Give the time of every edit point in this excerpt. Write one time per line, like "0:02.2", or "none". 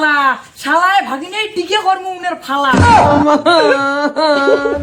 none